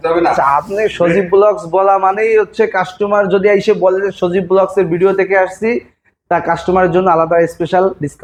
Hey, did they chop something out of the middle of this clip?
no; 0 cuts

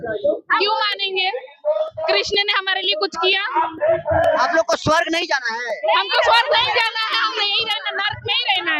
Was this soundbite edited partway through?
no; 0 cuts

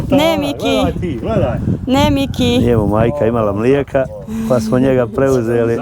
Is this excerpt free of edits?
yes; 0 cuts

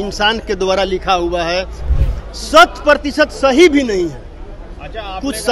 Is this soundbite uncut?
no; 1 cut; at 1.8 s

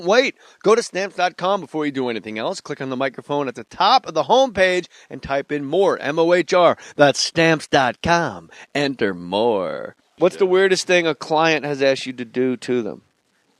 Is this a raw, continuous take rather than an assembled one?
no; 1 cut; at 11.6 s

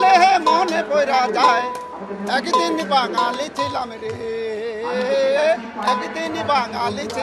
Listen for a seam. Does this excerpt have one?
no; 0 cuts

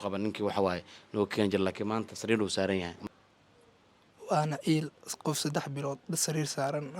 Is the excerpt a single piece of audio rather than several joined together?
no; 1 cut; at 3.0 s

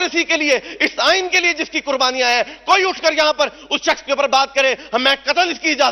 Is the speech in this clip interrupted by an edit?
no; 0 cuts

